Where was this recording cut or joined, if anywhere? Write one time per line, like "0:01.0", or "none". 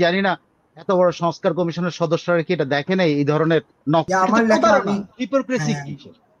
0:04.0